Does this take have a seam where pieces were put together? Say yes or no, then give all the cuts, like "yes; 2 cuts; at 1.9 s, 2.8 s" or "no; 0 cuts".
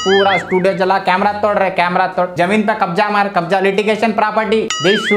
no; 0 cuts